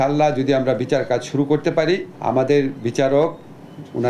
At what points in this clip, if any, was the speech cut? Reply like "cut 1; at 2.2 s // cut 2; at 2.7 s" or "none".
cut 1; at 2.1 s